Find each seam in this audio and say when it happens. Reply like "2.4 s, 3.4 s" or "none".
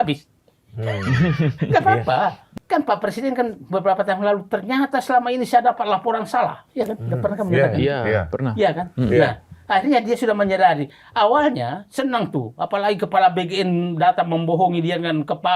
2.5 s